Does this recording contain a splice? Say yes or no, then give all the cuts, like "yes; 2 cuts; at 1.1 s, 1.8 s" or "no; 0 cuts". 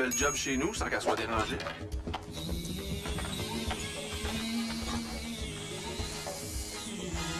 yes; 1 cut; at 5.2 s